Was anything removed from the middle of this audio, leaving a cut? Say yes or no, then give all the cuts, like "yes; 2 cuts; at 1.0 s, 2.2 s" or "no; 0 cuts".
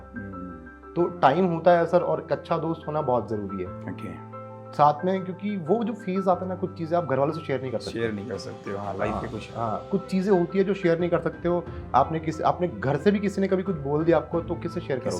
no; 0 cuts